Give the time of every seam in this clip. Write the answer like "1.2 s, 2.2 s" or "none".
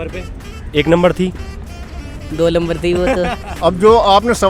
3.5 s